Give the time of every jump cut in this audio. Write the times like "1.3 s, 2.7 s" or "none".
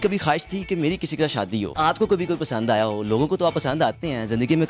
1.7 s